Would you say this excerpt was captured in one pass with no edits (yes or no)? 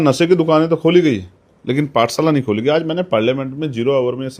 yes